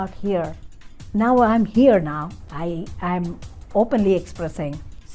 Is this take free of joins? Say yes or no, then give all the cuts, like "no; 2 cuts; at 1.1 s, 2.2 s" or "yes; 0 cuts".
no; 1 cut; at 2.4 s